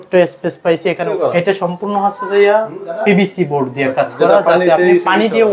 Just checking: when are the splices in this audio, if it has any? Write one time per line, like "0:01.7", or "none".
0:01.1

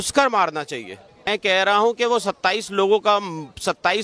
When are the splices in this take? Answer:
0:01.3

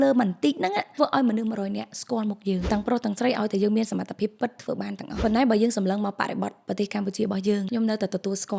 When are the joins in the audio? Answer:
0:00.9
0:02.6
0:05.2
0:07.7

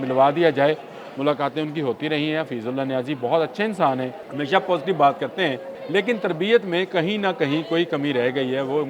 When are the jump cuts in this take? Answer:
0:04.2
0:05.7

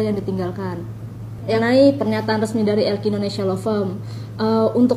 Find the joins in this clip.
0:01.6

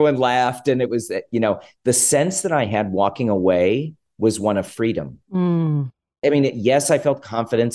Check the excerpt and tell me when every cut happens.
0:04.0
0:06.2

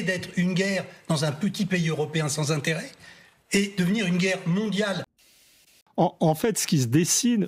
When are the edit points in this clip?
0:05.5

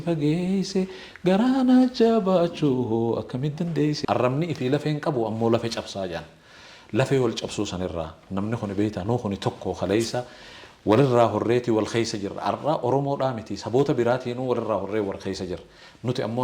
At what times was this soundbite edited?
0:04.0

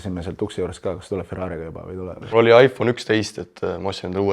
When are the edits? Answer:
0:02.2

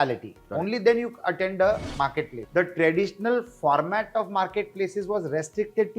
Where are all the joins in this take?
0:02.4

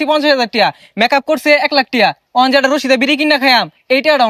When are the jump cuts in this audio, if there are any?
none

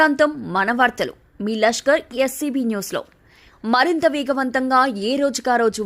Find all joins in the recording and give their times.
none

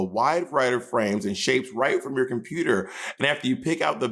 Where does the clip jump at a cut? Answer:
none

